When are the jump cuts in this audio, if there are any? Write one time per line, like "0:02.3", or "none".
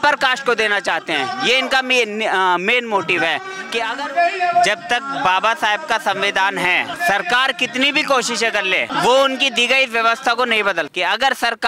0:03.9
0:06.9
0:08.9
0:10.9